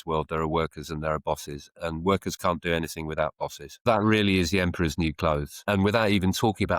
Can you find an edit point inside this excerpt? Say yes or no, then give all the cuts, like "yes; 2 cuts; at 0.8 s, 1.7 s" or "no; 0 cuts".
yes; 2 cuts; at 3.8 s, 5.6 s